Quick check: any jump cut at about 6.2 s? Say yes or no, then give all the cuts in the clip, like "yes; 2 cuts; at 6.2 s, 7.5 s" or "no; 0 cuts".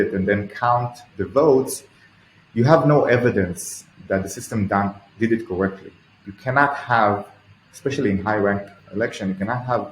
yes; 1 cut; at 6.2 s